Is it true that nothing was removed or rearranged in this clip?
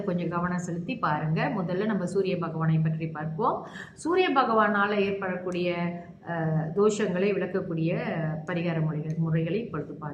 yes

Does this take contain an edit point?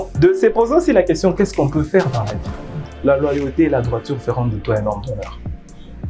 yes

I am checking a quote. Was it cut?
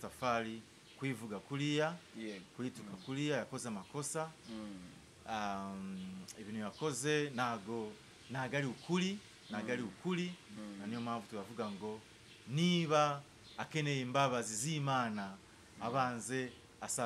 no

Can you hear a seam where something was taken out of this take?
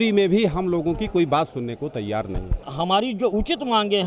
yes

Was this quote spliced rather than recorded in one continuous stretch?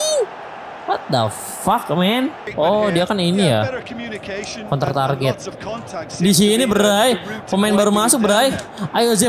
yes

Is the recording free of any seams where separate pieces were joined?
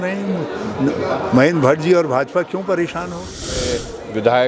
yes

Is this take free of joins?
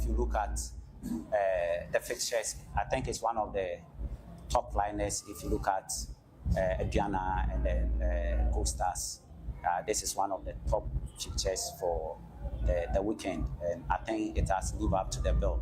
yes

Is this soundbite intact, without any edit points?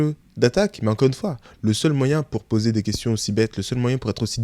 yes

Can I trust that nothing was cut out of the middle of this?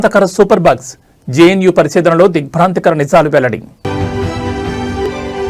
yes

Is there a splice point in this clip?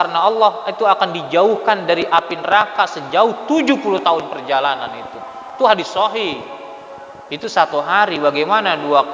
no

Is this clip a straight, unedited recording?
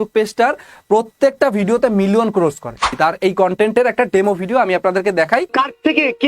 no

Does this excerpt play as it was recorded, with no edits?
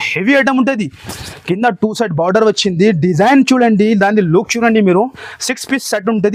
yes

